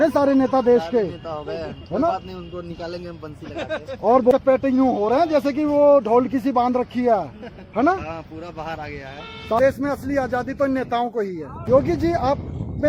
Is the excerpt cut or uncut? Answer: cut